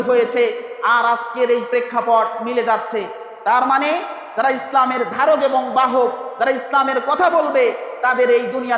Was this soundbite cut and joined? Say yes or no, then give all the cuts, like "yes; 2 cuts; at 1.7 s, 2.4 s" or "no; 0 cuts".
no; 0 cuts